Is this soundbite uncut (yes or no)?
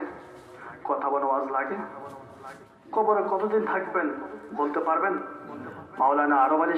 yes